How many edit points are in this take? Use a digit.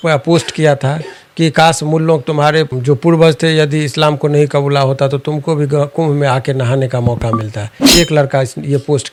0